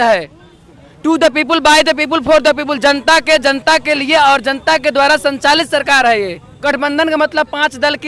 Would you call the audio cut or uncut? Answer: cut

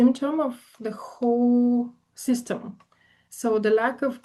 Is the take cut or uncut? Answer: uncut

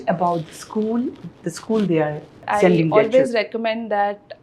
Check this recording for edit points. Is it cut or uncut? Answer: cut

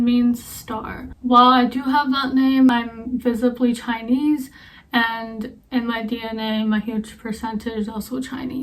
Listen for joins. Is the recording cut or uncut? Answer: uncut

